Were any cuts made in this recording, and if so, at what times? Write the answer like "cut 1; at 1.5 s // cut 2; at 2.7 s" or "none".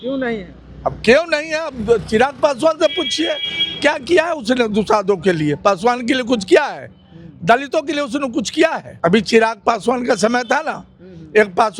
cut 1; at 8.9 s